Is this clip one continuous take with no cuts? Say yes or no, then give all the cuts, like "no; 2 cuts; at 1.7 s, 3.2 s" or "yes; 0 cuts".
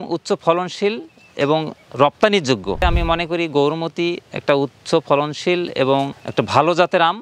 no; 2 cuts; at 2.8 s, 6.2 s